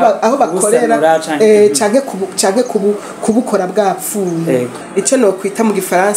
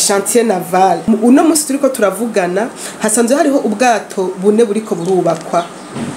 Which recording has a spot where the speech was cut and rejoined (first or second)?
second